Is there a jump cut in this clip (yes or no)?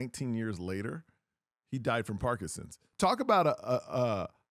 yes